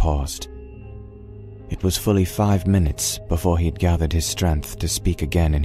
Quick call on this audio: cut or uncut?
cut